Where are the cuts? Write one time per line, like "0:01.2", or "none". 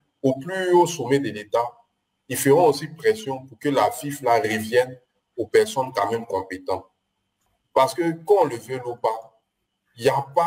0:07.4